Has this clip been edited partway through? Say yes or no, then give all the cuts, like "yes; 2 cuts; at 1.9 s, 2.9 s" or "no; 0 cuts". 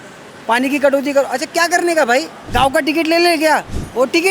yes; 1 cut; at 2.4 s